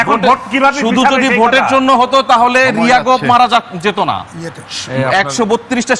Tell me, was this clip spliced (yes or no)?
no